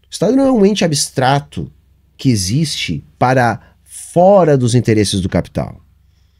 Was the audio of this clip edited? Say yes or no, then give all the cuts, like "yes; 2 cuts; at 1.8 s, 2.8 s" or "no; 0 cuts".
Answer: no; 0 cuts